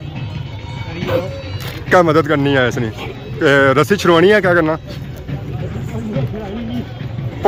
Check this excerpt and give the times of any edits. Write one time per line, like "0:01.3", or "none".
none